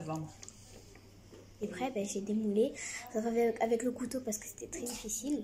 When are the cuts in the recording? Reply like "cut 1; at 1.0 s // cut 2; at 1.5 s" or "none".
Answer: cut 1; at 1.7 s